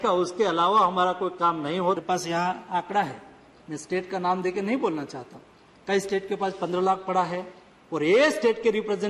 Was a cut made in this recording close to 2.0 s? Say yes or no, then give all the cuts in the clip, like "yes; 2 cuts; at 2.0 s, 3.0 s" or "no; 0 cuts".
yes; 1 cut; at 2.0 s